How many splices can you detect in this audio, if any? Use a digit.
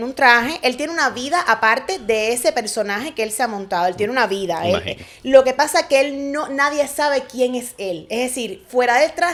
0